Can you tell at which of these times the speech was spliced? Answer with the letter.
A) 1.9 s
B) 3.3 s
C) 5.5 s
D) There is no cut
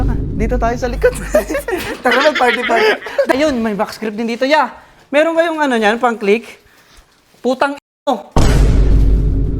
B